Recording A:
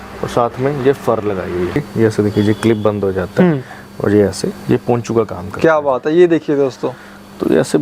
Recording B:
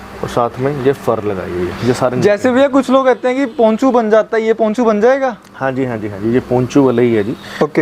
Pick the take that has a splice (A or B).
A